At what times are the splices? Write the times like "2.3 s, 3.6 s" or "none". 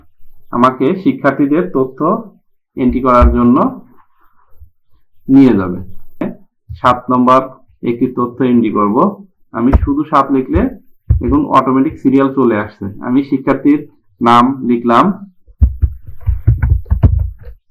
6.2 s